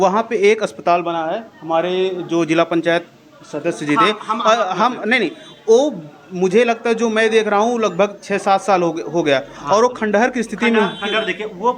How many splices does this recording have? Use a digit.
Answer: 0